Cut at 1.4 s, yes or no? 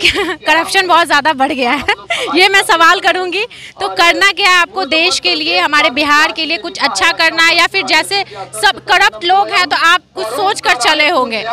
no